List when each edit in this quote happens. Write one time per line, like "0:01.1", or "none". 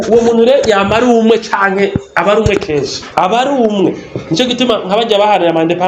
0:03.0